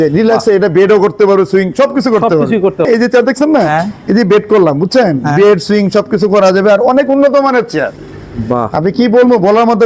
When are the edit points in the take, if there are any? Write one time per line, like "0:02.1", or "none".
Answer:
0:02.9